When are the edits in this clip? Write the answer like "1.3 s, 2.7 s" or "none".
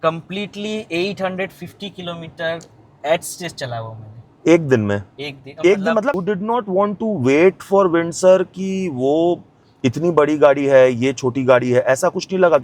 6.2 s